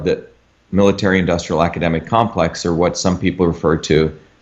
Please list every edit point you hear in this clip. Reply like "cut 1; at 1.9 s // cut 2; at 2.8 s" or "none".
none